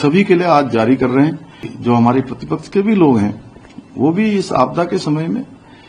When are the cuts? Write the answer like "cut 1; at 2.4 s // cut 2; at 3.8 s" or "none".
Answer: cut 1; at 1.7 s